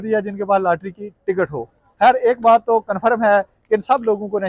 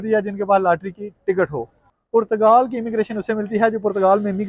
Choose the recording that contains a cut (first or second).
second